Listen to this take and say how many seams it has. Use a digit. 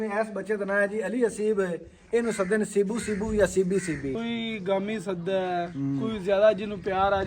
1